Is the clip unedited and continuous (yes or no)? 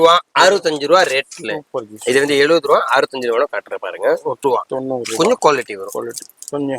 no